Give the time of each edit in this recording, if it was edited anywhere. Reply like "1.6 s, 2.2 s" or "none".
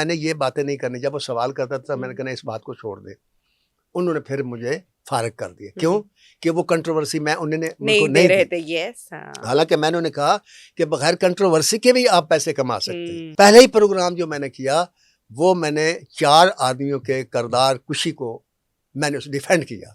13.3 s